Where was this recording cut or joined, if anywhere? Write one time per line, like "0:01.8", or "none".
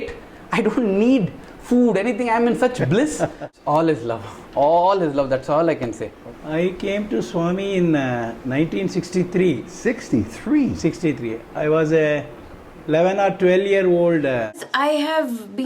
0:03.4
0:06.1
0:14.6